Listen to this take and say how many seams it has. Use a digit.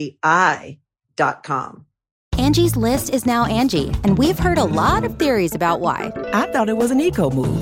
1